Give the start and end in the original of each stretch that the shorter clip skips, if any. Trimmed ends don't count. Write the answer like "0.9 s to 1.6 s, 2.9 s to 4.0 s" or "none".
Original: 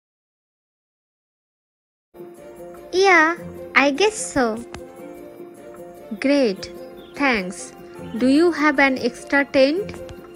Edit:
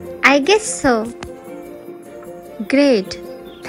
none